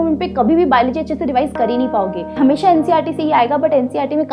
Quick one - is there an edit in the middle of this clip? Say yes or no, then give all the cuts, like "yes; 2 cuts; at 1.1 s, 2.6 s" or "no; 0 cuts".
yes; 1 cut; at 2.2 s